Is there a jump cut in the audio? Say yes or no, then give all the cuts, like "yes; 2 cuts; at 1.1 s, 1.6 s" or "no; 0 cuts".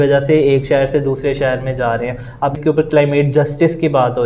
yes; 1 cut; at 2.6 s